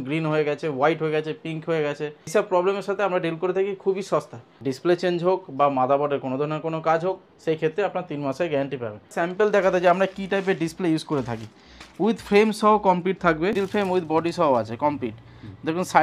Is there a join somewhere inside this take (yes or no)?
yes